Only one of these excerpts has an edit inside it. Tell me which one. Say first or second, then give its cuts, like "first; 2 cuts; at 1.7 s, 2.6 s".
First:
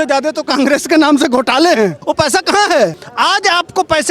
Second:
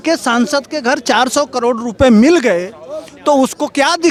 first; 2 cuts; at 2.0 s, 3.0 s